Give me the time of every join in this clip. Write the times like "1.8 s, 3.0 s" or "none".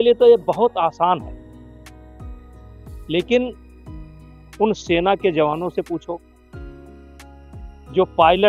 none